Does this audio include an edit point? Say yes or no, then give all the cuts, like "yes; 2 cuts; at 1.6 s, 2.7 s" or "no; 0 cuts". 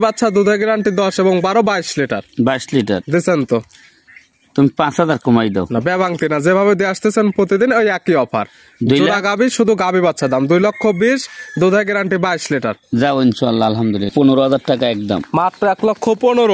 yes; 1 cut; at 14.1 s